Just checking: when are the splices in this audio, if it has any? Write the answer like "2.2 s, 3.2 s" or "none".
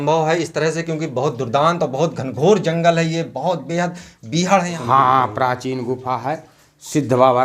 4.7 s